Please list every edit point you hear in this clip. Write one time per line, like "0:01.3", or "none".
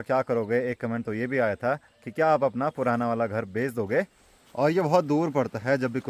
0:04.2